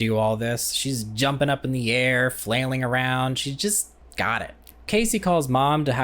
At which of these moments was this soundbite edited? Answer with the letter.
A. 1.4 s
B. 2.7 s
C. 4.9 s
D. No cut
C